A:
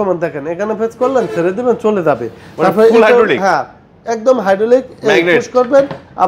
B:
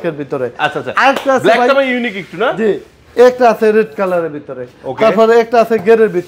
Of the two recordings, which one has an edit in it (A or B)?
B